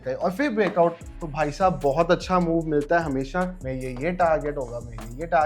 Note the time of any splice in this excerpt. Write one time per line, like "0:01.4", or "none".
0:01.0
0:03.5